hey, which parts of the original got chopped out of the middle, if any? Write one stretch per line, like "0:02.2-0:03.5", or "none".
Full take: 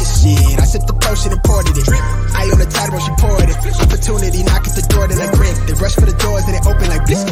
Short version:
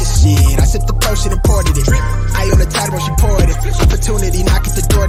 none